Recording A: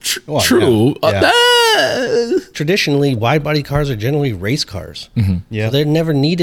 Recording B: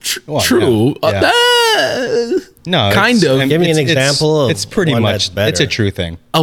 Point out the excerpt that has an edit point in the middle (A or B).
A